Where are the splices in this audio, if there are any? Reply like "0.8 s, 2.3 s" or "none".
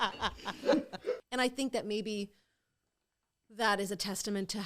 1.2 s